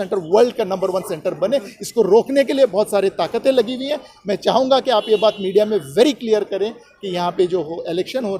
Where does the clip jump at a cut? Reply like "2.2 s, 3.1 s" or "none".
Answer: none